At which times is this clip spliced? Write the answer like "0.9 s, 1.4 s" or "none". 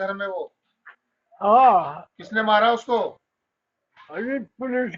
none